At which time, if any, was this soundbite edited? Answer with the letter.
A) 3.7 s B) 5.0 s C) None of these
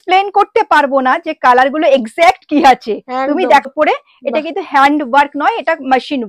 A